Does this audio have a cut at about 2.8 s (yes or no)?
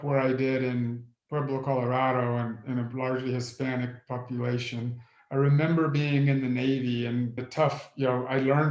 no